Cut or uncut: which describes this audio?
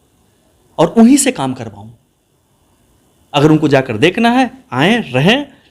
cut